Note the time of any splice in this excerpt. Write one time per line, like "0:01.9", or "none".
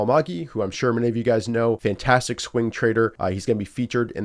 0:01.8
0:03.2